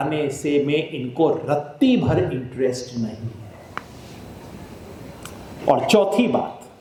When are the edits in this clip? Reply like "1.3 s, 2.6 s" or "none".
none